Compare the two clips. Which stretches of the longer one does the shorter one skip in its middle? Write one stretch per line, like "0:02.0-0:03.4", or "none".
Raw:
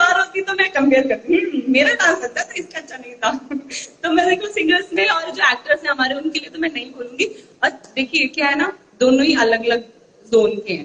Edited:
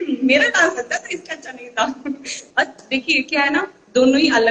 0:03.8-0:07.4